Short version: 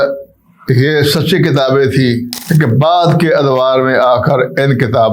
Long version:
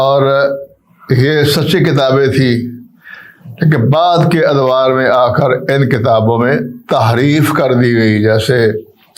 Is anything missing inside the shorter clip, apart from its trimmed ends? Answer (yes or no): yes